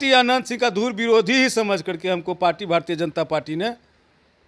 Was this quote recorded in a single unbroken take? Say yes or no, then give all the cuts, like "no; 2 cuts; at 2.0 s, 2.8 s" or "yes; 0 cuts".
yes; 0 cuts